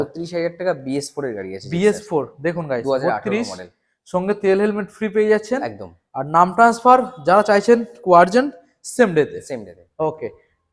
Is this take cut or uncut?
uncut